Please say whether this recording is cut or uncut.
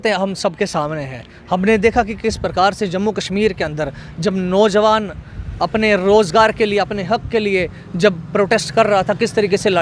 uncut